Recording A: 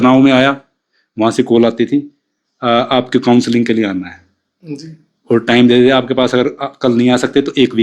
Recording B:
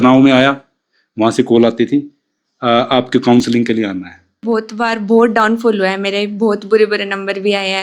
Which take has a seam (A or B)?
B